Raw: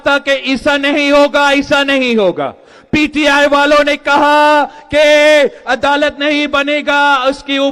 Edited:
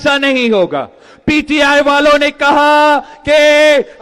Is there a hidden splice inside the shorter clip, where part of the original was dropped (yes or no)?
no